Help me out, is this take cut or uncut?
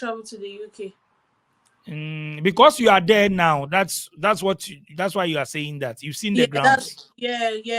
uncut